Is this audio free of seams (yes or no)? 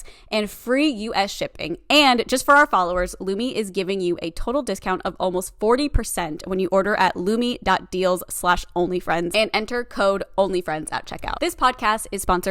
no